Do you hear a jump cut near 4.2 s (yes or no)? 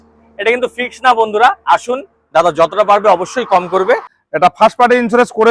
yes